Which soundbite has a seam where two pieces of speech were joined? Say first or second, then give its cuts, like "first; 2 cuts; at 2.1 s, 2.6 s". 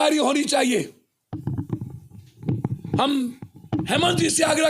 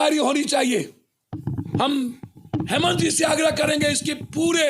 second; 1 cut; at 1.6 s